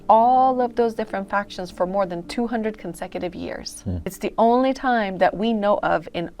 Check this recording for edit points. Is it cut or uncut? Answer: cut